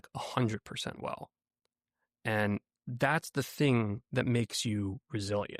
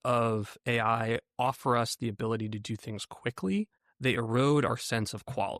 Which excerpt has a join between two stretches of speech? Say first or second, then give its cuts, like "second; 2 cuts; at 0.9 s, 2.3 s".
second; 1 cut; at 3.8 s